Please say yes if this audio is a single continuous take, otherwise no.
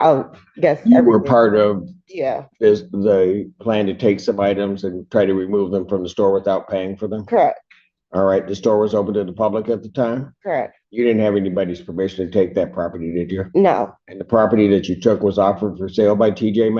yes